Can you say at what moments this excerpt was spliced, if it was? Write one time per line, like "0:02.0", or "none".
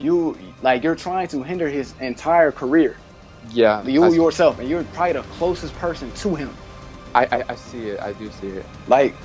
none